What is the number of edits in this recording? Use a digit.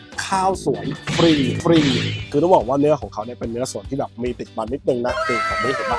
1